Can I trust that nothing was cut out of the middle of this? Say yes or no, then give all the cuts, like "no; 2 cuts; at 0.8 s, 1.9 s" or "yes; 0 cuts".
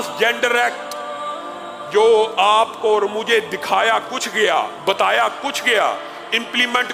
yes; 0 cuts